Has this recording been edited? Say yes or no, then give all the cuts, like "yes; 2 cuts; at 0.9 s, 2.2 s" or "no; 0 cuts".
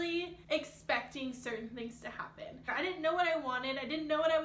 yes; 1 cut; at 2.7 s